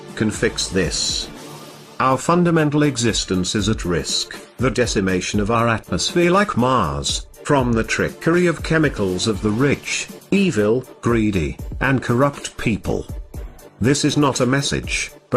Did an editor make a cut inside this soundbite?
yes; 1 cut; at 14.2 s

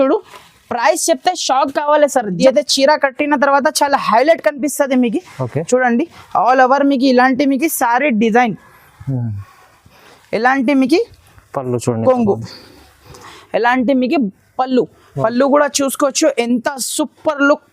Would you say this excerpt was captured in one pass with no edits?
no; 2 cuts; at 2.4 s, 13.3 s

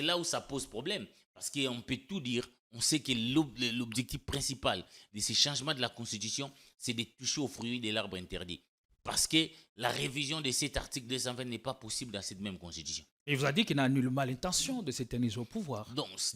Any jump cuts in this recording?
no; 0 cuts

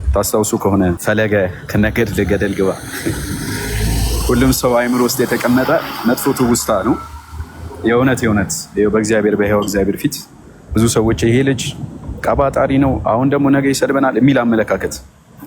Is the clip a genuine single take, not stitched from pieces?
no; 1 cut; at 1.0 s

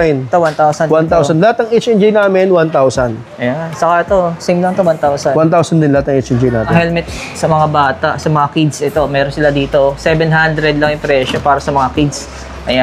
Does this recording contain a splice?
yes; 1 cut; at 6.7 s

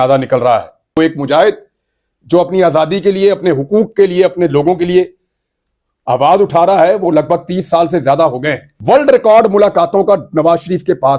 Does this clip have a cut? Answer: yes; 2 cuts; at 1.0 s, 8.7 s

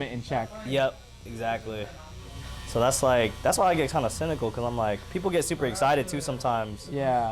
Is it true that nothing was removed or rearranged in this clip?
yes; 0 cuts

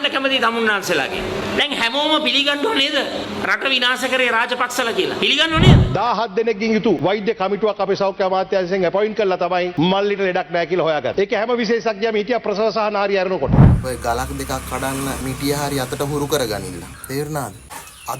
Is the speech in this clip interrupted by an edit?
yes; 6 cuts; at 5.8 s, 7.0 s, 9.7 s, 11.1 s, 13.7 s, 15.2 s

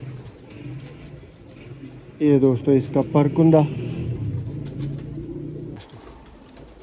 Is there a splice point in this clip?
yes; 1 cut; at 5.8 s

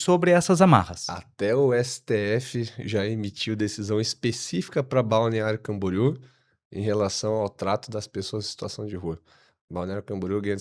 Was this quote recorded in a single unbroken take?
yes; 0 cuts

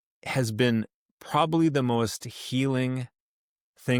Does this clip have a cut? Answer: no; 0 cuts

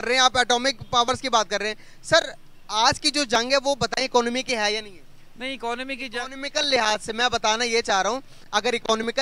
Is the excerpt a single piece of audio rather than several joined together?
yes; 0 cuts

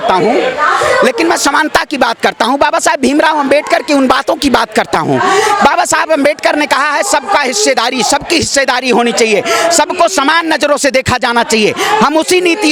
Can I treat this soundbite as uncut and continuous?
yes; 0 cuts

